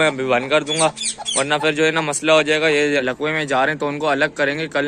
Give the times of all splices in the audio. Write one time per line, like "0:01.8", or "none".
0:03.0